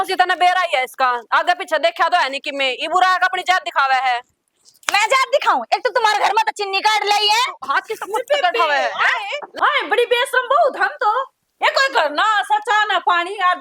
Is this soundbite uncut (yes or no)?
yes